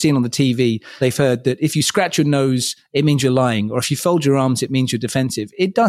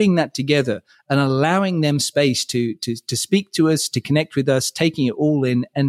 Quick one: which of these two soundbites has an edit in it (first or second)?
first